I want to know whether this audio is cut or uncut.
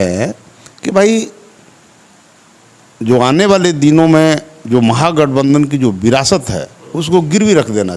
uncut